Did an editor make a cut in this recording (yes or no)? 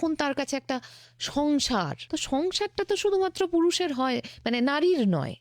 yes